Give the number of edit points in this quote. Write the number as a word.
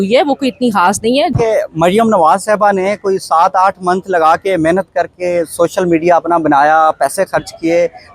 one